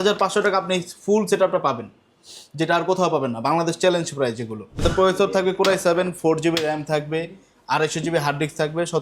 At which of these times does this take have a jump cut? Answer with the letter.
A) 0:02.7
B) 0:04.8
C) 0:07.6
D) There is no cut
B